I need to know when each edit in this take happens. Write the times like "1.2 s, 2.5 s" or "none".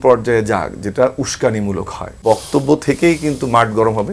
2.2 s